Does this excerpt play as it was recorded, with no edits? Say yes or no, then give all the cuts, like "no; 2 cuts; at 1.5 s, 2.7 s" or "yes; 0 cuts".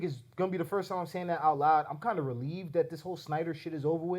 yes; 0 cuts